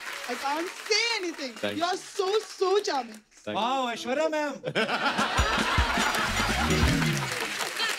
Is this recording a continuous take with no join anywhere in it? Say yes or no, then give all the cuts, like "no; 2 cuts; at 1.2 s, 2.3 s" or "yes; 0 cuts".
yes; 0 cuts